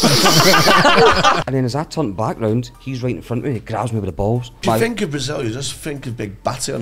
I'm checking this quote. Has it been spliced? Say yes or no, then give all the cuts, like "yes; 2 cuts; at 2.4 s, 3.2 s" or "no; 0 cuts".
yes; 3 cuts; at 1.4 s, 2.8 s, 4.6 s